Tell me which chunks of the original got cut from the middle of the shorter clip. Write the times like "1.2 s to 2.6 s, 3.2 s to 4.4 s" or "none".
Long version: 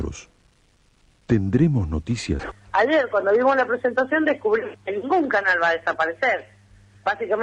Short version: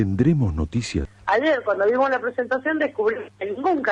2.5 s to 2.6 s